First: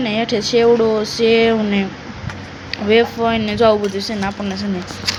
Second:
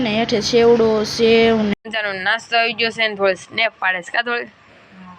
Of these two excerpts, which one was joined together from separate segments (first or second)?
second